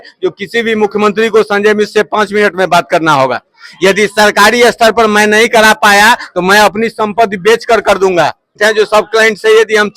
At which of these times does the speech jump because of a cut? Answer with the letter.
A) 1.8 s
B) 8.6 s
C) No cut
B